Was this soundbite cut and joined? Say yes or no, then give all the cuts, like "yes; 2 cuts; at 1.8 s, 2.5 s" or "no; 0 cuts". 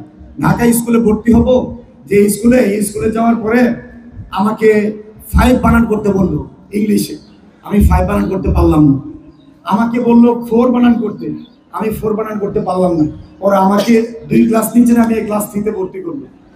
no; 0 cuts